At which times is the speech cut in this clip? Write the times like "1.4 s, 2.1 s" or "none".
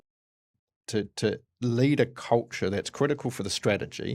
none